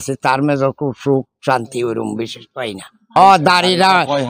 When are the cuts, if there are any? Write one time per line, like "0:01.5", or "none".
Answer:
0:03.1